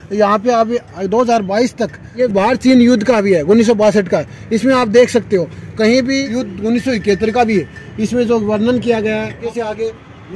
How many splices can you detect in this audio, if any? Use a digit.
3